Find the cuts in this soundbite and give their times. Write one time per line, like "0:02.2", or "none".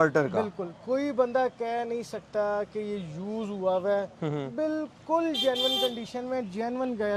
none